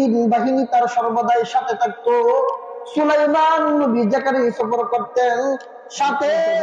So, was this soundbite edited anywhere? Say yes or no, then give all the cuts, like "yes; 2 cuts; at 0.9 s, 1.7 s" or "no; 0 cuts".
no; 0 cuts